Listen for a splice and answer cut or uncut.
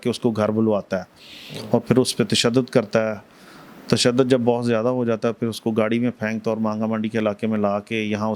uncut